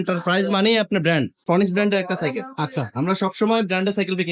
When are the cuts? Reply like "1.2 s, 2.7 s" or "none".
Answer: 1.4 s